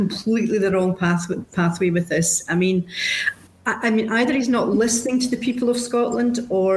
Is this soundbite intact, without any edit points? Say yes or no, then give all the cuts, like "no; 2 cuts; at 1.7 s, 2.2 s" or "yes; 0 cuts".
yes; 0 cuts